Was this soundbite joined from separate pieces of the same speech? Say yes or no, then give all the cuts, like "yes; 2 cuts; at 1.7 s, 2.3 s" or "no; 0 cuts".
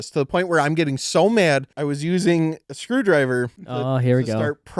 yes; 3 cuts; at 1.7 s, 2.7 s, 3.6 s